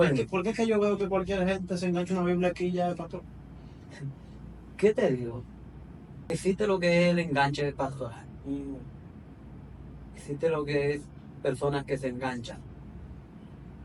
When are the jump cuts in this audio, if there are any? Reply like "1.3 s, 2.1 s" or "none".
none